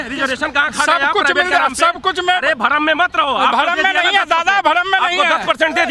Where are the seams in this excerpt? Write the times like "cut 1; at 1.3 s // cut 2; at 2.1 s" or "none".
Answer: none